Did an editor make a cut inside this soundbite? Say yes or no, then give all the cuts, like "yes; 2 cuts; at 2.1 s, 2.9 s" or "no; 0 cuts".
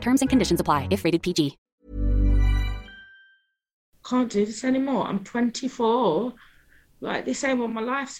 yes; 1 cut; at 3.9 s